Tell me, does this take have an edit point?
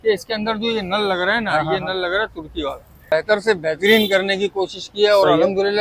yes; 1 cut; at 3.1 s

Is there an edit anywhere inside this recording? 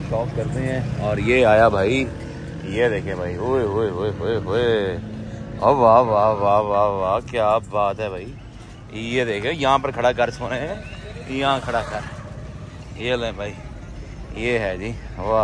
no; 0 cuts

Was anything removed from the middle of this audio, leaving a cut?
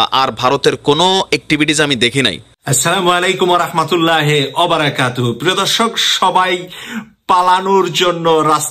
yes; 1 cut; at 2.5 s

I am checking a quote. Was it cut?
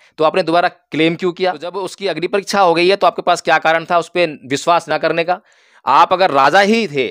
yes; 1 cut; at 2.0 s

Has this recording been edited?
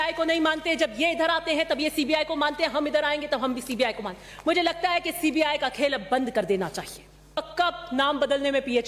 yes; 1 cut; at 7.4 s

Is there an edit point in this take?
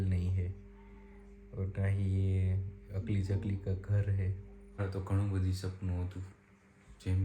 yes; 1 cut; at 4.8 s

